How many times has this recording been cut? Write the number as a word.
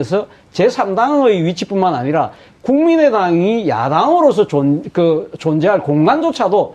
one